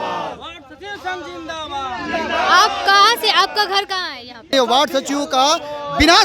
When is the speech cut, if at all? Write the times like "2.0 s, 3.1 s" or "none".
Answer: 4.5 s